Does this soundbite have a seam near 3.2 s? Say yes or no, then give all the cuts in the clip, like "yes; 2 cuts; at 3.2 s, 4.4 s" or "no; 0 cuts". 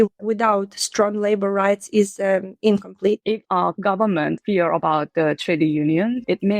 yes; 1 cut; at 3.2 s